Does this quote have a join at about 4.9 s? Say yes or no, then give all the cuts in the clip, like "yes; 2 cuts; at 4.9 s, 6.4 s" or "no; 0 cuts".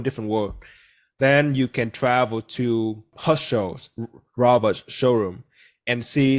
no; 1 cut; at 3.1 s